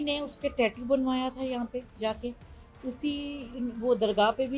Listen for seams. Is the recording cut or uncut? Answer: uncut